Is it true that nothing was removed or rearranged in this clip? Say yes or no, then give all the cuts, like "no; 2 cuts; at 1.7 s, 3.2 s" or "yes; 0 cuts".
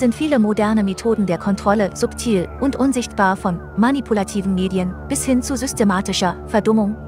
yes; 0 cuts